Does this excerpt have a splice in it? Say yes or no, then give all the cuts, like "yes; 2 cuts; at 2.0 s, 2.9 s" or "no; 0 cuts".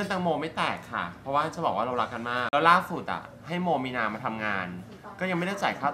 yes; 1 cut; at 2.4 s